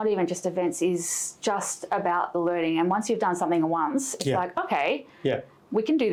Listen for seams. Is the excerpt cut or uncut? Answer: uncut